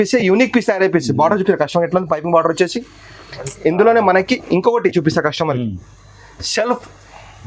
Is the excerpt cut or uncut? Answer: uncut